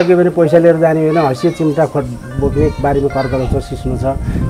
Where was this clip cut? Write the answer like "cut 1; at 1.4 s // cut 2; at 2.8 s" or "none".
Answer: none